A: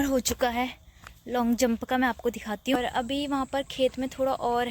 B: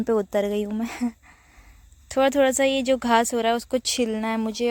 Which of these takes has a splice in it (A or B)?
A